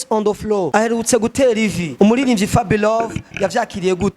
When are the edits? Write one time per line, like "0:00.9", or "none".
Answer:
0:00.8
0:01.8